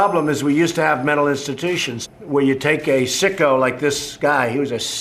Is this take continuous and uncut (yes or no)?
no